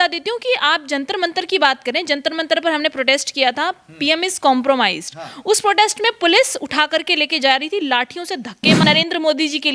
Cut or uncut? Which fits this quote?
cut